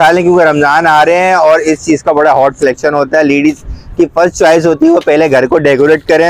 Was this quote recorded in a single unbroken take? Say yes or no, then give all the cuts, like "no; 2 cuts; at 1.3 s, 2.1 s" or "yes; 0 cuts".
yes; 0 cuts